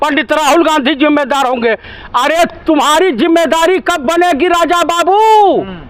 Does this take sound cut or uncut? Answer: uncut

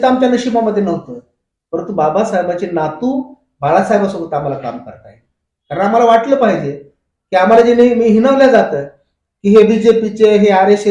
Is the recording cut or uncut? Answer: uncut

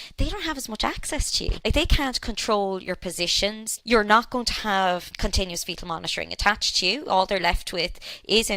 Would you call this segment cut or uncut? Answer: cut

